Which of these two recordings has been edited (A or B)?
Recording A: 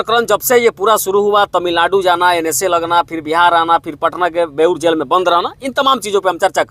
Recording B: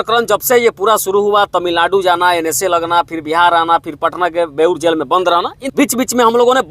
B